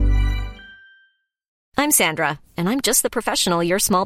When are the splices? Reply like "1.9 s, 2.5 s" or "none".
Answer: 1.5 s